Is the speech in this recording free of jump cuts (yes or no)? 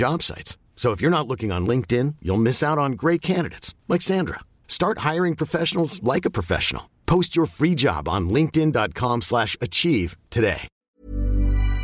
no